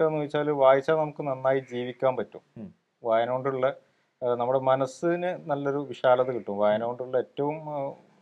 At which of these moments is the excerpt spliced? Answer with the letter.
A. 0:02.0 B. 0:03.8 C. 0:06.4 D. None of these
D